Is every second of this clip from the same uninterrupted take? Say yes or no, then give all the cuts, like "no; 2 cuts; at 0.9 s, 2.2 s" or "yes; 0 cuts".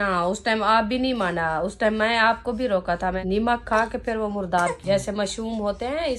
no; 2 cuts; at 3.2 s, 4.8 s